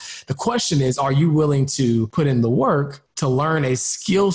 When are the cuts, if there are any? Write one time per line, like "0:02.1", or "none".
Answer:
0:02.1
0:03.0

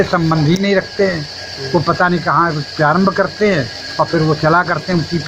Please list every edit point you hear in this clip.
none

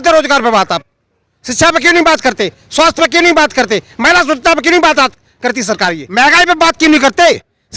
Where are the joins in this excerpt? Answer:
0:06.0

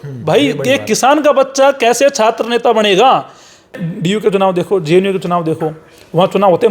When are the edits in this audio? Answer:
0:03.9

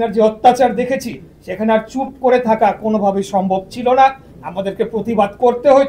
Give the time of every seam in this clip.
none

